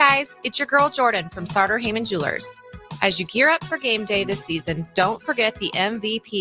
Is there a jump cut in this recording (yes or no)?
no